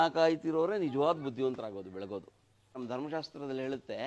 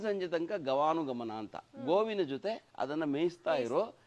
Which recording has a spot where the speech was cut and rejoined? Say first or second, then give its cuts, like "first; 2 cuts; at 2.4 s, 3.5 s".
first; 1 cut; at 2.8 s